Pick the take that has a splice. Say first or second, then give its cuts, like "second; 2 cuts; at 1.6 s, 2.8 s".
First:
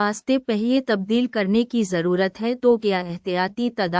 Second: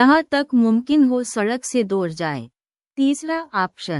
second; 1 cut; at 2.8 s